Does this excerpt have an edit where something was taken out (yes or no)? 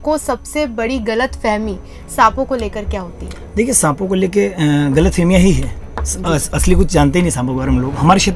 no